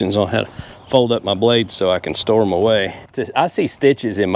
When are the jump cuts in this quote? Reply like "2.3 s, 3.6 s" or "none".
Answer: 3.1 s